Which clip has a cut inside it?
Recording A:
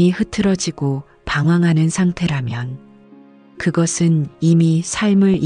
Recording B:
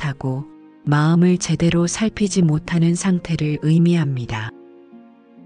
B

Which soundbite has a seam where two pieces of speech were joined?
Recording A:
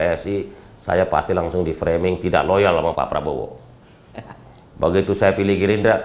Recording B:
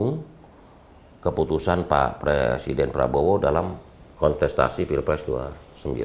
A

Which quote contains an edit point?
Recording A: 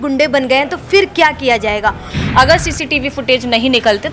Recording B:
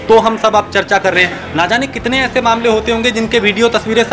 A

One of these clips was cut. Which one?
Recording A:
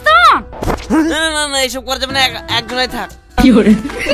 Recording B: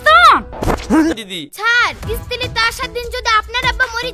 B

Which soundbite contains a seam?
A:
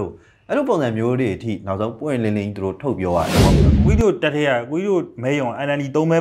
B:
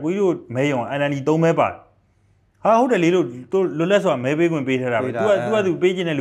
A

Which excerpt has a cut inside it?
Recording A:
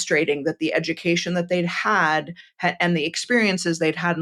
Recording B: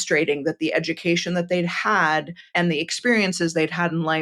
B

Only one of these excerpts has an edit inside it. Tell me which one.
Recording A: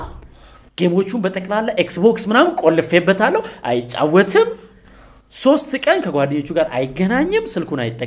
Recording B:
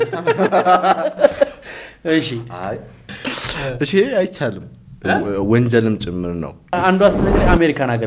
B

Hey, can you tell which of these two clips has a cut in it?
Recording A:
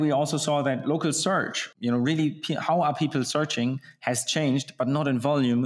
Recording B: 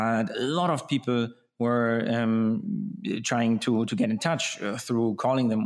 A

